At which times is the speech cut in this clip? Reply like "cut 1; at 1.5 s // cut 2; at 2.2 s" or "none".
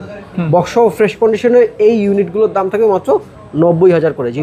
none